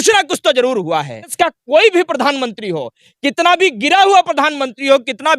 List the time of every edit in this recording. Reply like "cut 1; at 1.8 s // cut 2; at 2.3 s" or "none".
cut 1; at 1.3 s